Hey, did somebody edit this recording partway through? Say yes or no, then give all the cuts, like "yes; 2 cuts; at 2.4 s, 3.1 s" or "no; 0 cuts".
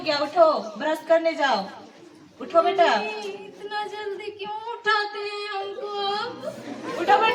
no; 0 cuts